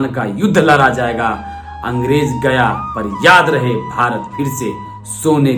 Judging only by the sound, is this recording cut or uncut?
uncut